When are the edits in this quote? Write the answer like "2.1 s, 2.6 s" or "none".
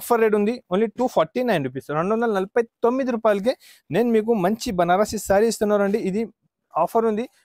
none